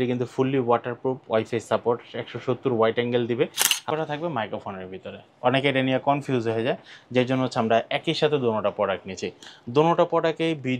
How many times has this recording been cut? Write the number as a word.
one